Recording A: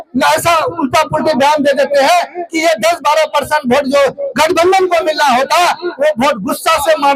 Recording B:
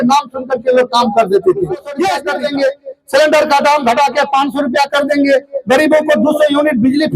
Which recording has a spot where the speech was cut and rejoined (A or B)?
B